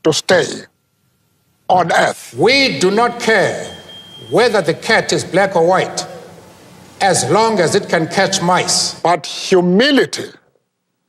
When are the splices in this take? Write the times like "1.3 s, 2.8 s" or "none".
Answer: 2.2 s, 8.8 s